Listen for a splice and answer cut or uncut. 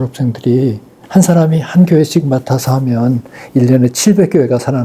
cut